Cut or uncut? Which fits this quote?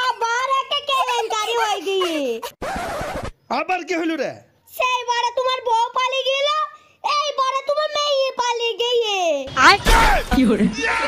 uncut